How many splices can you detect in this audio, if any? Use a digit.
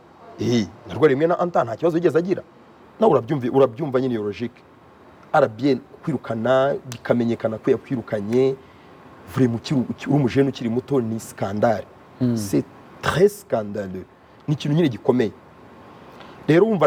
0